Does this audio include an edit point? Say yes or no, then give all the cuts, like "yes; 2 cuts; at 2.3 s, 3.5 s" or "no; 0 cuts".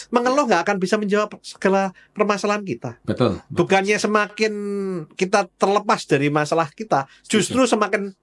no; 0 cuts